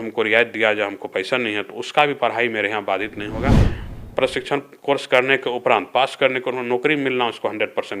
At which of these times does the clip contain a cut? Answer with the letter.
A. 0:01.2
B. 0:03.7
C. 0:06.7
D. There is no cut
B